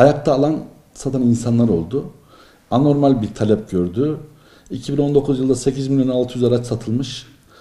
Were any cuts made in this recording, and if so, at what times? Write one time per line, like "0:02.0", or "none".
none